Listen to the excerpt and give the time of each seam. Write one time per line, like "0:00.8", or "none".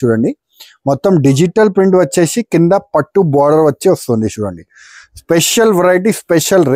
none